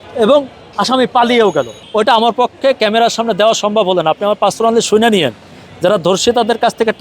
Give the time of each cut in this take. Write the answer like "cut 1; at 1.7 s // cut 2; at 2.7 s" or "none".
cut 1; at 1.8 s